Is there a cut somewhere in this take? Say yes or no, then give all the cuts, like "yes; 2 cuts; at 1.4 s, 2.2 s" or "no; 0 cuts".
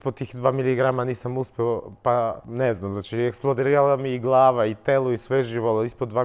no; 0 cuts